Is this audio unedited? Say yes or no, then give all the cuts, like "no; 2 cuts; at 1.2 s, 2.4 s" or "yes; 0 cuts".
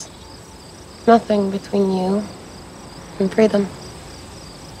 yes; 0 cuts